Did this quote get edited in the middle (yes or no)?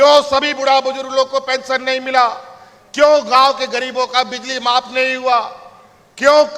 no